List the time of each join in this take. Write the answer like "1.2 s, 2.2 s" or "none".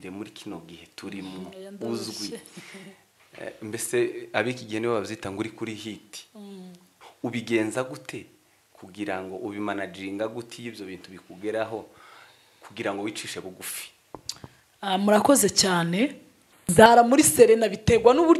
16.5 s